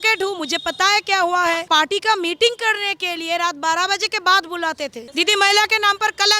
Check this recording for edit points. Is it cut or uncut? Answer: cut